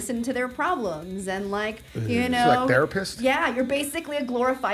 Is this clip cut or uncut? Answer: uncut